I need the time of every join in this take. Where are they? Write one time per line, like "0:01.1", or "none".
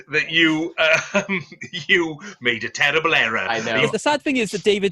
0:03.9